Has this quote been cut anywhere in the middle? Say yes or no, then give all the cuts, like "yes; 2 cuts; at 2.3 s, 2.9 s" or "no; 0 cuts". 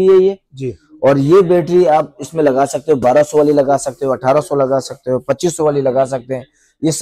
no; 0 cuts